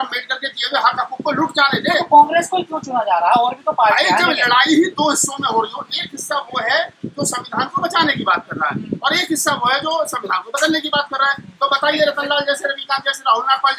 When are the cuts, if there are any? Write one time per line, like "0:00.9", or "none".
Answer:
none